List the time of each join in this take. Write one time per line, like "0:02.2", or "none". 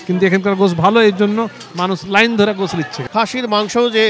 0:03.0